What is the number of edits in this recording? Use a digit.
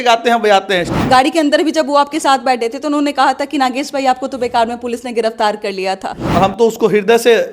2